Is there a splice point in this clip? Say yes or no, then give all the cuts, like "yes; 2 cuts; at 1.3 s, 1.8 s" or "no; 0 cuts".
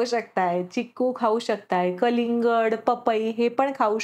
no; 0 cuts